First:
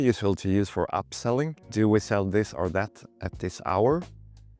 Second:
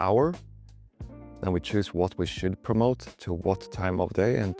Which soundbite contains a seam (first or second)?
first